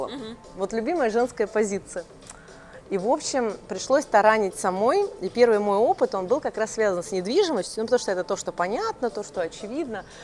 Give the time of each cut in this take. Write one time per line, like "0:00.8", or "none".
none